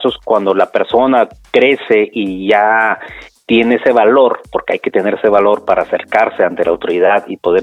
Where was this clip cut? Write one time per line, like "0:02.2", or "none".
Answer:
none